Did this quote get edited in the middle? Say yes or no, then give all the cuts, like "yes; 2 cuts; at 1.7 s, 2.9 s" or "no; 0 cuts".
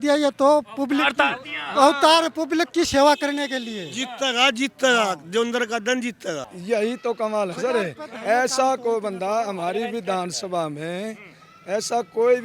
yes; 1 cut; at 6.5 s